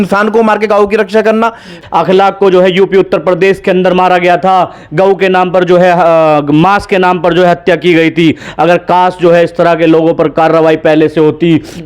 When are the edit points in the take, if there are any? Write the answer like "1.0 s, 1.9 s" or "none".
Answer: 1.8 s